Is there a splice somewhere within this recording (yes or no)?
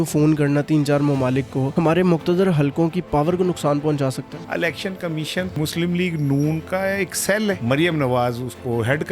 yes